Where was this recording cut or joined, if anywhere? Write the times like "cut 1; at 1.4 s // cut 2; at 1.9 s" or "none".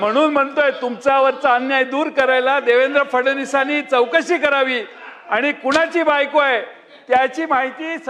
none

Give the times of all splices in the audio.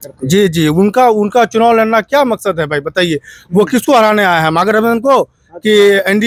none

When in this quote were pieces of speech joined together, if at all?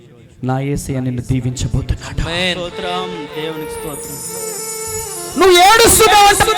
none

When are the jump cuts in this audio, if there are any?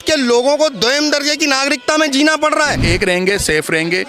cut 1; at 2.8 s

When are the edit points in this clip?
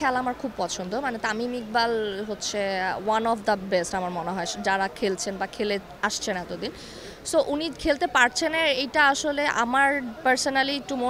none

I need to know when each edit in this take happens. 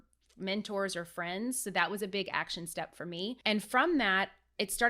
cut 1; at 3.4 s

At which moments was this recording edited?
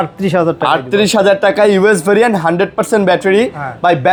none

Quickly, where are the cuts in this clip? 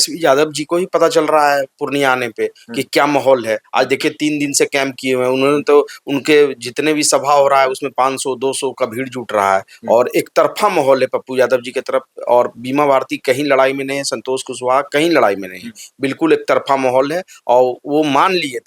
none

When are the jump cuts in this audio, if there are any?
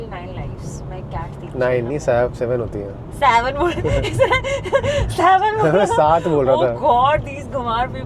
none

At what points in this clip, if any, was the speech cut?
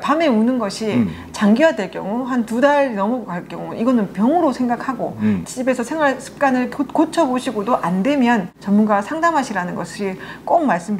none

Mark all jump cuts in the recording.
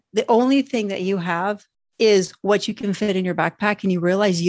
none

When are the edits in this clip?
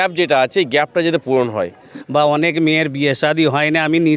cut 1; at 1.9 s

